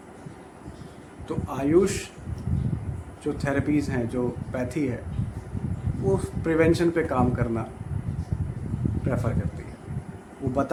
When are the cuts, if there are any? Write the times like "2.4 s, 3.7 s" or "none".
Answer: none